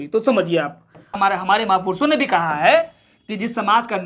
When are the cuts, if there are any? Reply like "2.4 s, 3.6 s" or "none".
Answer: 1.2 s